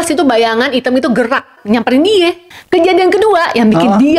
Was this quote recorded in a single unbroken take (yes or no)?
no